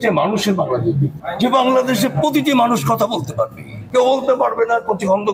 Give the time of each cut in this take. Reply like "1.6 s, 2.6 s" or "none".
3.7 s